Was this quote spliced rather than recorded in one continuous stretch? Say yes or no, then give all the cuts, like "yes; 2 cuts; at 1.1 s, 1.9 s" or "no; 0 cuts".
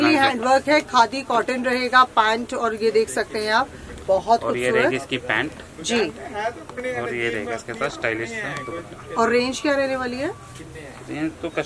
no; 0 cuts